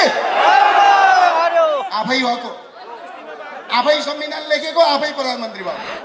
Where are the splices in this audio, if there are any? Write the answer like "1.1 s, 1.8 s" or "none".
none